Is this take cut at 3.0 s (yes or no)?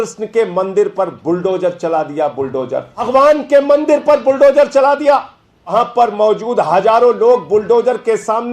yes